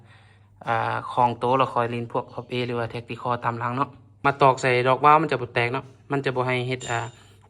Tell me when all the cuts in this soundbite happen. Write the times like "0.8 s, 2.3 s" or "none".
4.2 s